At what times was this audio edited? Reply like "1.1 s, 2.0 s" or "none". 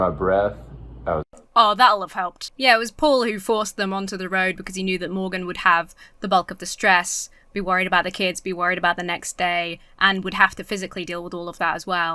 none